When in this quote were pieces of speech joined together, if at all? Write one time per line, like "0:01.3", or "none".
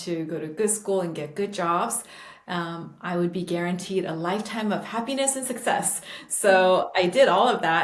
none

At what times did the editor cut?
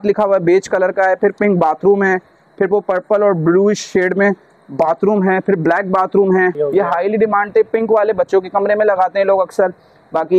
0:06.6

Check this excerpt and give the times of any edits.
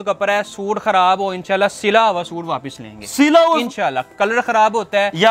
none

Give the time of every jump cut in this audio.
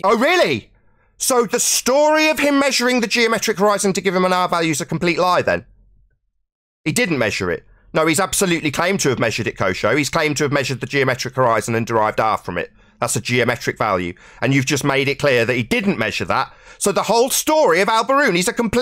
none

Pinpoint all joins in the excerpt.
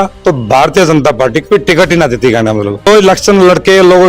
0:02.9

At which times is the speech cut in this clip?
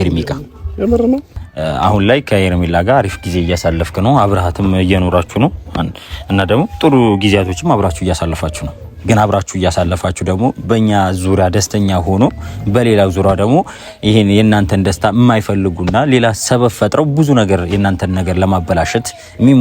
0:01.3

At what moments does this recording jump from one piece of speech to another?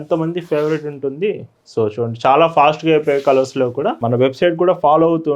0:04.0

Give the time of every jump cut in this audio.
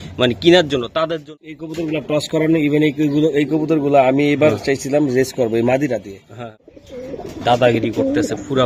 0:01.3
0:06.4

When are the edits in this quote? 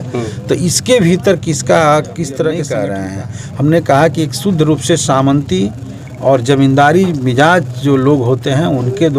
0:02.8

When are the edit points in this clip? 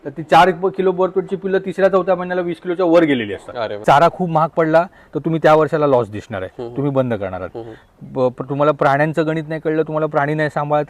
0:03.8

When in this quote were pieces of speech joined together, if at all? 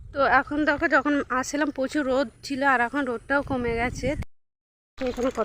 0:04.2

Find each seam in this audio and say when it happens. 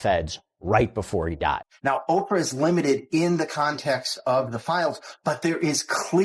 0:01.6

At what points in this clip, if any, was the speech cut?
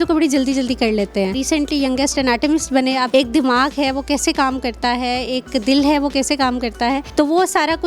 0:01.4
0:03.1
0:07.1

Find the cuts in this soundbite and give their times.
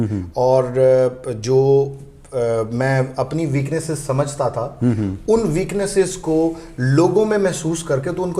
none

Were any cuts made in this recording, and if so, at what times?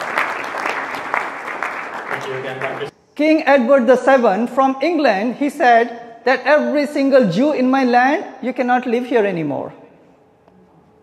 0:02.8

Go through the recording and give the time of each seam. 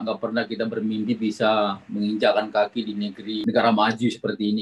0:03.4

